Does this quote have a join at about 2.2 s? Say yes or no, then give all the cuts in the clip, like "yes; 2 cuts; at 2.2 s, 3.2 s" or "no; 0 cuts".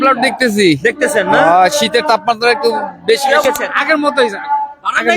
no; 1 cut; at 3.4 s